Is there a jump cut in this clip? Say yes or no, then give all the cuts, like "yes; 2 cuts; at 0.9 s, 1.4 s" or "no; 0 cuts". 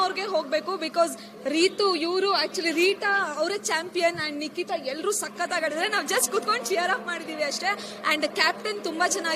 no; 0 cuts